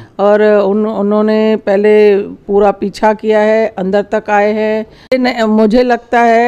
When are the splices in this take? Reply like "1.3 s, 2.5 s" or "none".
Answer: 5.1 s